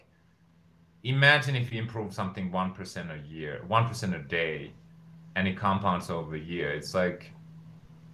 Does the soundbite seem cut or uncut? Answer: uncut